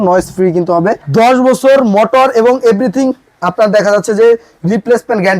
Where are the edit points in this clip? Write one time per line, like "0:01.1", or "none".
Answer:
0:01.0